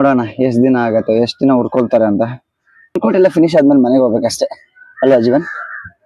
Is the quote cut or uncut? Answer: cut